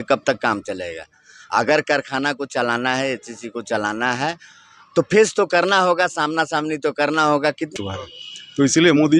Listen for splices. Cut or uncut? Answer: cut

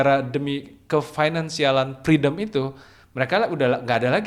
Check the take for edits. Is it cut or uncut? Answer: uncut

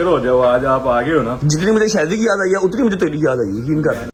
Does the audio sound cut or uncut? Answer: uncut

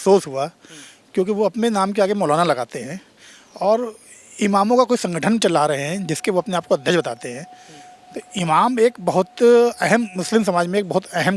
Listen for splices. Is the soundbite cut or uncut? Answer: uncut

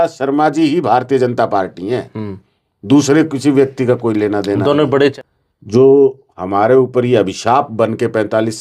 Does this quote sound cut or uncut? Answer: cut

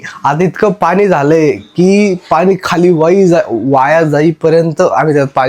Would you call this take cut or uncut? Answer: uncut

